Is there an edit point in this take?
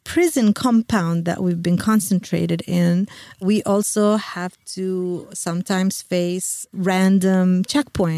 no; 0 cuts

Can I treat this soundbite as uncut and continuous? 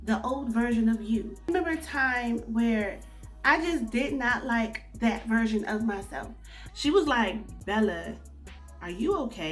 no; 2 cuts; at 1.5 s, 6.6 s

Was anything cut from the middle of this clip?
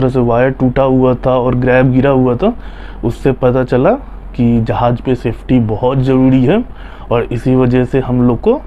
no; 0 cuts

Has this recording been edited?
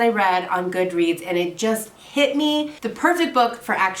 yes; 1 cut; at 2.8 s

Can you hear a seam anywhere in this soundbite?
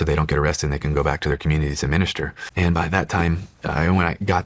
yes; 1 cut; at 2.4 s

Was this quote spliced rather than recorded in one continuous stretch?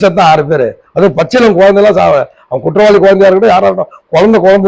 no; 0 cuts

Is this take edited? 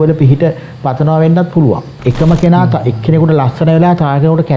yes; 1 cut; at 1.9 s

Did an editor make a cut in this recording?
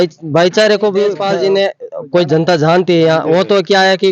yes; 1 cut; at 1.2 s

